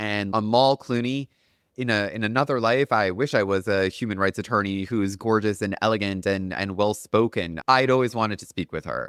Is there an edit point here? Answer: no; 0 cuts

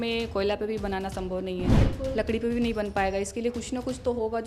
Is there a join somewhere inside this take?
no; 0 cuts

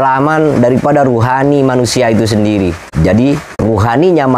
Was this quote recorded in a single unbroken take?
no; 2 cuts; at 2.8 s, 3.5 s

